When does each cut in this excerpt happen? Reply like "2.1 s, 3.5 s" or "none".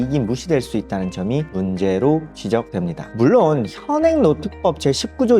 3.1 s